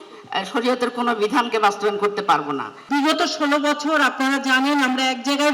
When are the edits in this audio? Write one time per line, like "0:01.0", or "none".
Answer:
0:02.7